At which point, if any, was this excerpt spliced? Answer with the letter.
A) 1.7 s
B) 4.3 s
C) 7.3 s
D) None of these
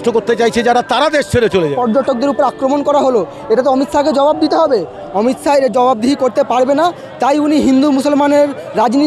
A